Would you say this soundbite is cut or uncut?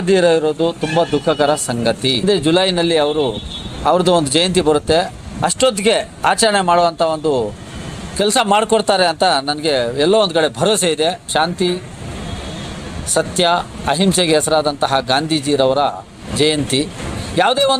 cut